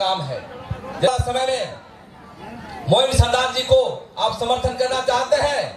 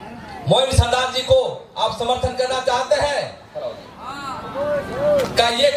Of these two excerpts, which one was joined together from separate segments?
first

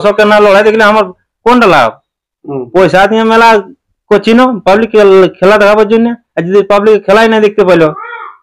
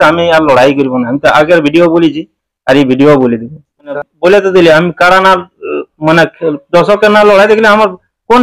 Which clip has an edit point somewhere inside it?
second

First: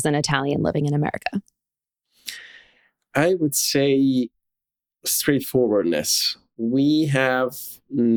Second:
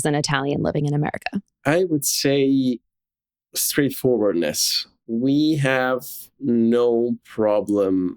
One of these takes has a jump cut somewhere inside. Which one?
second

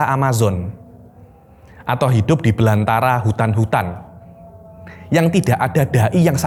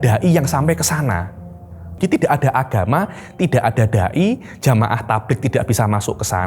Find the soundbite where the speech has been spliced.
second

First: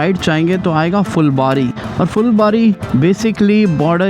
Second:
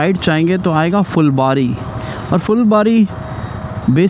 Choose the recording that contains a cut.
first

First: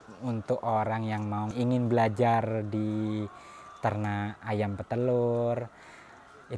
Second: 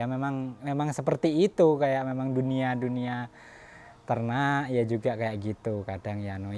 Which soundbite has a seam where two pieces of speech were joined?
first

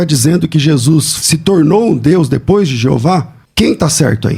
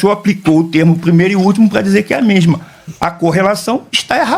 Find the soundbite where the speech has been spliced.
first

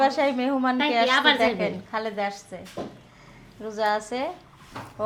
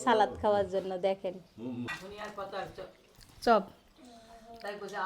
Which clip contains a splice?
second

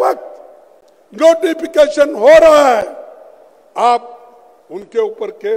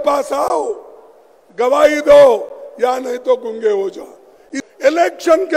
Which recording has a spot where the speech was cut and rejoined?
second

